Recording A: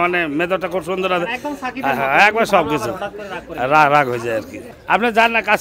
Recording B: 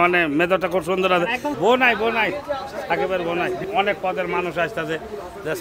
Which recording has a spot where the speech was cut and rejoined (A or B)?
B